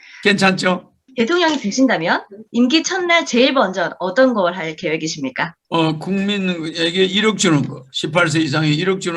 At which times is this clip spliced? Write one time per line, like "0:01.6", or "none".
0:01.0